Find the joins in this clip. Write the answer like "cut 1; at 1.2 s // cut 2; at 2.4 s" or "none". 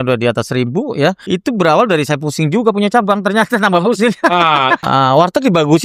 cut 1; at 1.2 s // cut 2; at 4.8 s